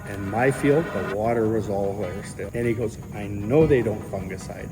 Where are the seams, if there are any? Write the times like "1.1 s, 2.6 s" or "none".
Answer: 2.5 s